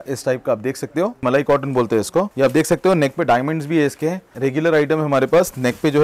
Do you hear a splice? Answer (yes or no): yes